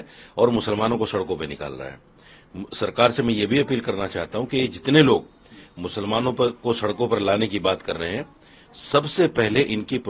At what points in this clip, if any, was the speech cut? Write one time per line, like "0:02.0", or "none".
none